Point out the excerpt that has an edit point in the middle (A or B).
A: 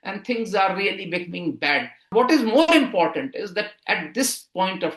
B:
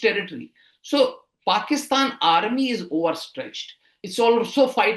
A